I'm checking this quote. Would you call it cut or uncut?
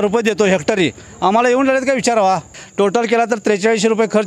cut